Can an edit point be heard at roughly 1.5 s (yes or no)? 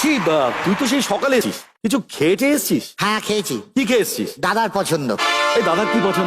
yes